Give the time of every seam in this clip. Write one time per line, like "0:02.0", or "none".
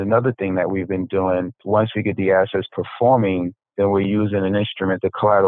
0:01.6